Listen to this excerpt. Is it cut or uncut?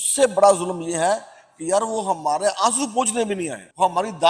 uncut